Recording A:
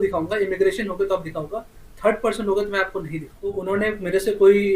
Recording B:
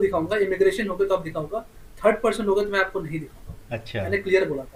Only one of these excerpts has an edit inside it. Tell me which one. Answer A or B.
A